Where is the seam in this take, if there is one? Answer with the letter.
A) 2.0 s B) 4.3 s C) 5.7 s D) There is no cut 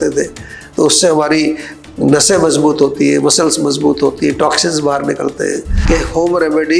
C